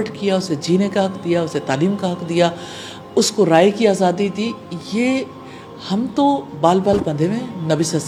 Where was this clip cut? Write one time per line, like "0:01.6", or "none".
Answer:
none